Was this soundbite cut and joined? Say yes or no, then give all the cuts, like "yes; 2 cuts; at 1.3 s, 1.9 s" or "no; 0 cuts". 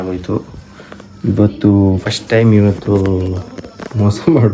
yes; 1 cut; at 2.0 s